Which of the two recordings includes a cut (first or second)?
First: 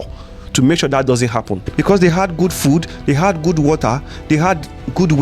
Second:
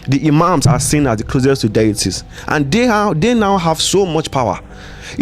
first